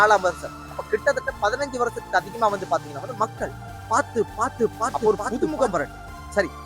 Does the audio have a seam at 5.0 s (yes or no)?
yes